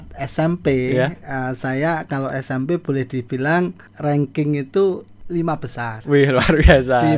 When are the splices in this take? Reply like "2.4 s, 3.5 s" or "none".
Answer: 3.9 s, 5.1 s